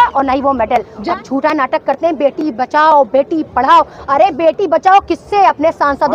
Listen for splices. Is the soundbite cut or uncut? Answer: cut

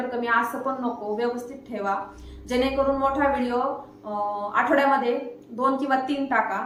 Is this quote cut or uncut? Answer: uncut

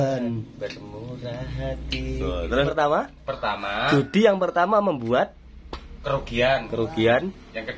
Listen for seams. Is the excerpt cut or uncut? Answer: cut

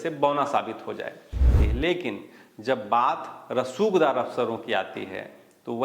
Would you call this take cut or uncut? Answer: cut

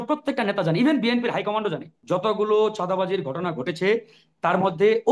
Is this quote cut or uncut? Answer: cut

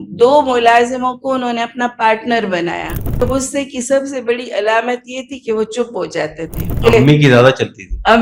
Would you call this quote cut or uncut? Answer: cut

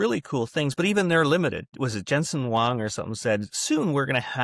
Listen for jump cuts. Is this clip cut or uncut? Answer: cut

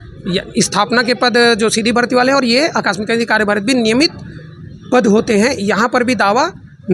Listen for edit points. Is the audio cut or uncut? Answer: uncut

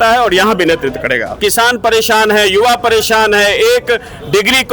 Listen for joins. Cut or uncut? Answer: cut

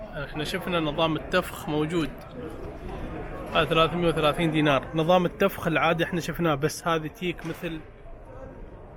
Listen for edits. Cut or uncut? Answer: uncut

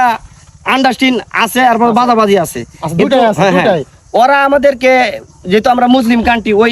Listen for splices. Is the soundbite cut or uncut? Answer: uncut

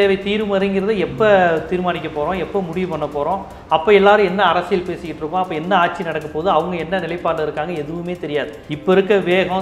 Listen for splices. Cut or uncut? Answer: cut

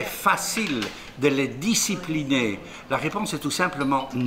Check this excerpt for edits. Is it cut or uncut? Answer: cut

